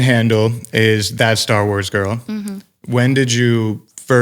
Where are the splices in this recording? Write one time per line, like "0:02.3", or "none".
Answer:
none